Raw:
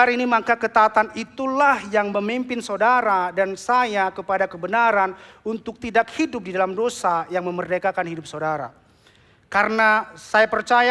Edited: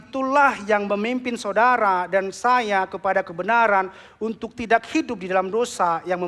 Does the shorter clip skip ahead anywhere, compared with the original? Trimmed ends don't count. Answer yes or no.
no